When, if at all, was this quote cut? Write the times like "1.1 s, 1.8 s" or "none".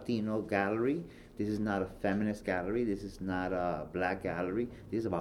none